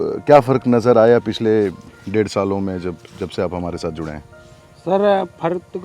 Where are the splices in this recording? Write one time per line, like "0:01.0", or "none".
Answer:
none